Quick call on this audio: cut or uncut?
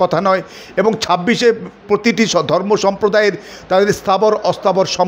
uncut